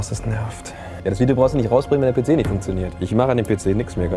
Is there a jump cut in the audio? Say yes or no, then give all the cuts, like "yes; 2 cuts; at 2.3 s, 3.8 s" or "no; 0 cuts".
yes; 2 cuts; at 1.0 s, 2.9 s